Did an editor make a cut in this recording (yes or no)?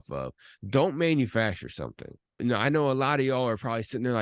yes